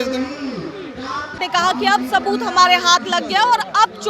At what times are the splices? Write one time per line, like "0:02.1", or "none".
0:01.4